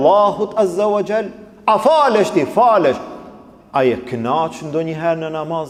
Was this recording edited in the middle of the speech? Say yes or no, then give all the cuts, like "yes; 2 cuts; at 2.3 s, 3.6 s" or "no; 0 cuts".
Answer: no; 0 cuts